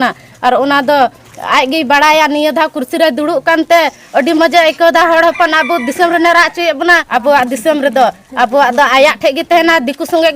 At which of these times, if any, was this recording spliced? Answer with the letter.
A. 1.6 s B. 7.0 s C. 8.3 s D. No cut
B